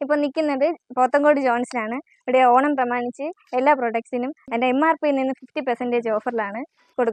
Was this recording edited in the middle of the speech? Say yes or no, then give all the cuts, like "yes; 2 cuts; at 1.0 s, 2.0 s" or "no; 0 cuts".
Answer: no; 0 cuts